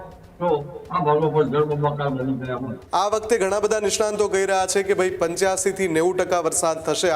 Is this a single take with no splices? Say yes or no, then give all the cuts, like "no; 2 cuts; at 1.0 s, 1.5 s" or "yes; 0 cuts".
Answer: no; 1 cut; at 2.7 s